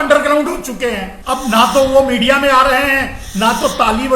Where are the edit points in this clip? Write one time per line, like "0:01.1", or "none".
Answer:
0:01.1